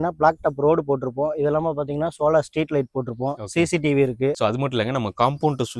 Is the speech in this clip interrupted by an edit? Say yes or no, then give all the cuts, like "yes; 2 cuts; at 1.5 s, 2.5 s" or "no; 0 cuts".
yes; 1 cut; at 4.3 s